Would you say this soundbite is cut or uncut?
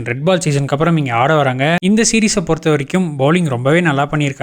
cut